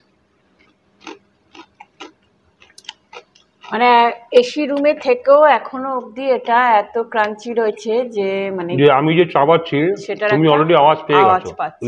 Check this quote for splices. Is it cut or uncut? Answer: uncut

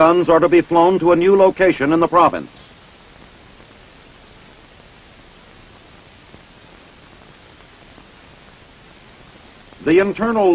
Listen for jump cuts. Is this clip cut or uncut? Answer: uncut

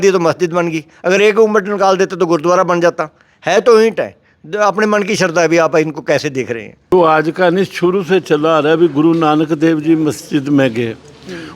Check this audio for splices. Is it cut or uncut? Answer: cut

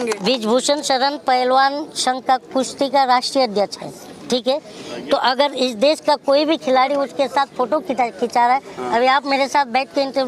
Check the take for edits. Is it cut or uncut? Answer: uncut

